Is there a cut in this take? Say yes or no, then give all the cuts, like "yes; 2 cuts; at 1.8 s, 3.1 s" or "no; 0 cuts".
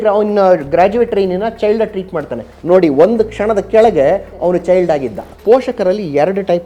yes; 1 cut; at 5.3 s